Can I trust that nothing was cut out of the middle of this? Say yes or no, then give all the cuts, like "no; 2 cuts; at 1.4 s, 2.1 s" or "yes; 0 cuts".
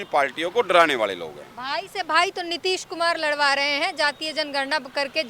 yes; 0 cuts